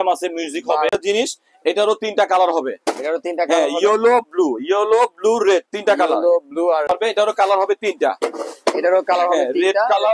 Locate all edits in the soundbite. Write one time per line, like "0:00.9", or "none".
0:01.0
0:06.9

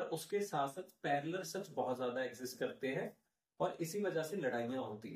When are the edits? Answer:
none

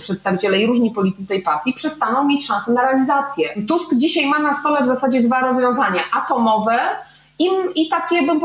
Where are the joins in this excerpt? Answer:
0:03.6

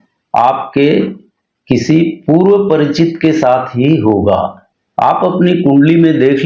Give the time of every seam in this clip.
0:04.6

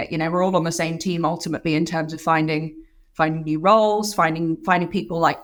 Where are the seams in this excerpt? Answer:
none

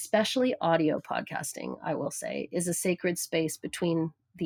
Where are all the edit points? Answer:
none

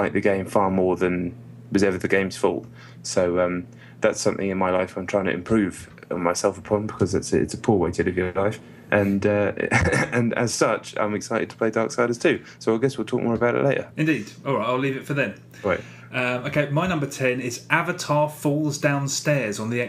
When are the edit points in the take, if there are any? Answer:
none

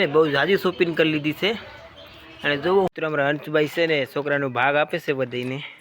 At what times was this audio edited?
0:02.9

